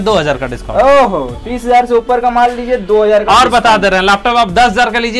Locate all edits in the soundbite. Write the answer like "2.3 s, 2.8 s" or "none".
none